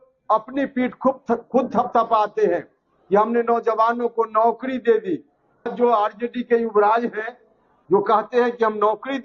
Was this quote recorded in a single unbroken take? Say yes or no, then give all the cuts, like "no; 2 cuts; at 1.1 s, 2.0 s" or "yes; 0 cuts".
no; 1 cut; at 5.7 s